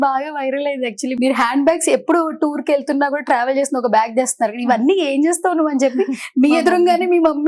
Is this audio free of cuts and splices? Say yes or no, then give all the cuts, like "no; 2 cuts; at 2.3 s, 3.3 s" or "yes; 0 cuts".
no; 1 cut; at 1.1 s